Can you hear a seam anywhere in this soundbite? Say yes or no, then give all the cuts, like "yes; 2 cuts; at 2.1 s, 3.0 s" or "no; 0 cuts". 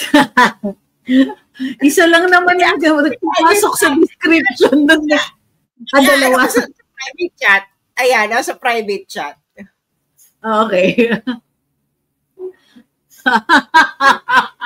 no; 0 cuts